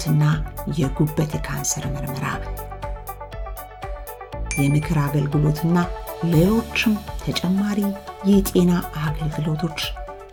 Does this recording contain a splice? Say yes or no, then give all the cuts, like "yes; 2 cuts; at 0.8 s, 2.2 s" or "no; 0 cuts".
no; 0 cuts